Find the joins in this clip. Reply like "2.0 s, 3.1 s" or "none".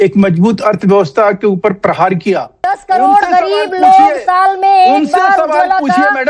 2.6 s